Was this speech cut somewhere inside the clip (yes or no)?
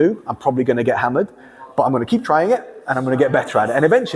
no